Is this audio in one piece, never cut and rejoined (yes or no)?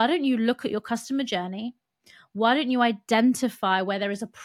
yes